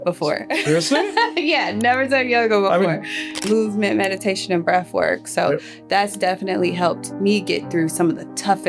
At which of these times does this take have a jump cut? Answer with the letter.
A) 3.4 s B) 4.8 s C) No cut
A